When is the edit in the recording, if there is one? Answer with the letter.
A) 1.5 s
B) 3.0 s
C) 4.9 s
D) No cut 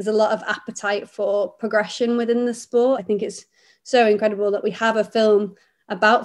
B